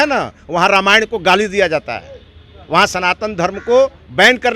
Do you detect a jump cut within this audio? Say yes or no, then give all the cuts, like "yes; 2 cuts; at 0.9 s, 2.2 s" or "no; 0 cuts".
no; 0 cuts